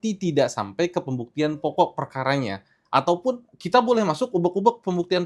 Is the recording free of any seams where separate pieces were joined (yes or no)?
yes